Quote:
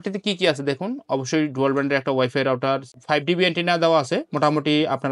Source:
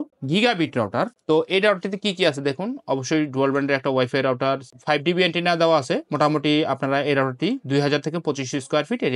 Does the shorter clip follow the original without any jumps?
yes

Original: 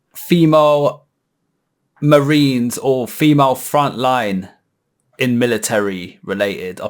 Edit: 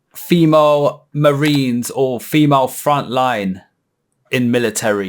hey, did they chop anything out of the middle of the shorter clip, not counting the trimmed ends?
yes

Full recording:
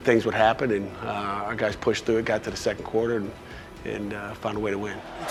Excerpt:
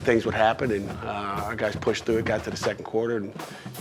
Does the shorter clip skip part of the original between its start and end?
no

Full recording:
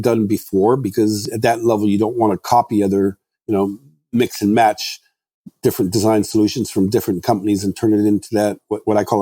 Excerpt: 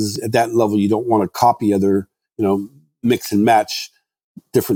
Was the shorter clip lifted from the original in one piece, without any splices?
yes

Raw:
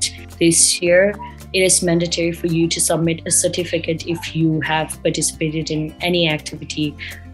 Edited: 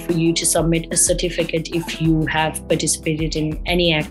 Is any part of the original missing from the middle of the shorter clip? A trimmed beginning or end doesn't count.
no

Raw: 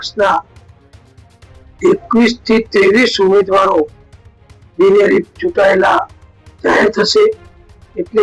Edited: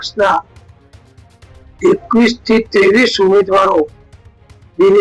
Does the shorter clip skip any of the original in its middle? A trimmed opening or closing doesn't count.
no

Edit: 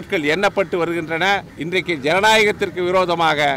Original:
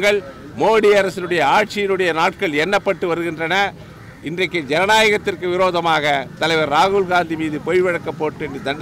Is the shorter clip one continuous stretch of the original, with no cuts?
no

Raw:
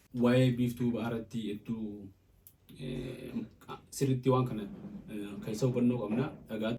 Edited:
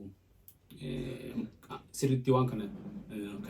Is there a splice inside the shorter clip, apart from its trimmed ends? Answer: no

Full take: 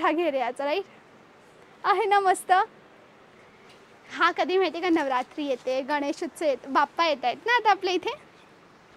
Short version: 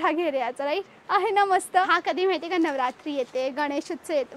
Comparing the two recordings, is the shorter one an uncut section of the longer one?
no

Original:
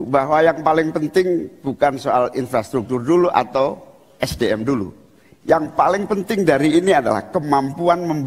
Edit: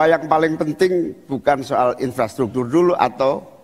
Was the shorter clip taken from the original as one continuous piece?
yes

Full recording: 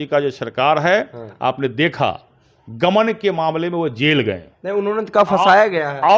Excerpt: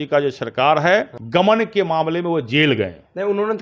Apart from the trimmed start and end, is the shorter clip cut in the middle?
yes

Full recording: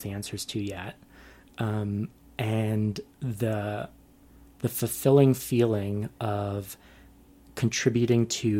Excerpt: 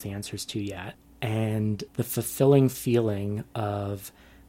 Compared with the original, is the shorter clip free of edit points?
no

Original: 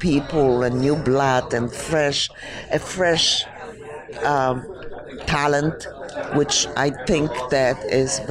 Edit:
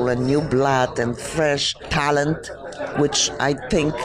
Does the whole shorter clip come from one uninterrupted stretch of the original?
no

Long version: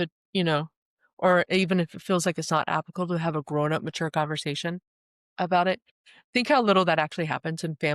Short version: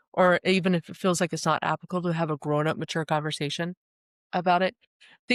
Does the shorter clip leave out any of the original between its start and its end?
no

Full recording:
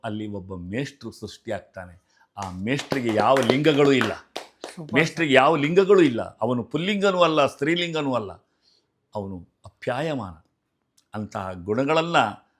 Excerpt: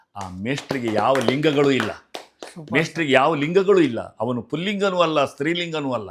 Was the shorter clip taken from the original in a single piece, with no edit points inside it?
yes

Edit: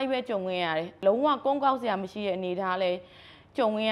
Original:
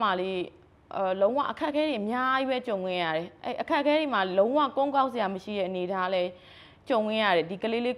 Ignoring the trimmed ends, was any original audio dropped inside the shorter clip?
yes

